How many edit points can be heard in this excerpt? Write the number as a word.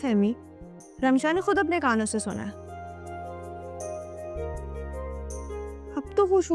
zero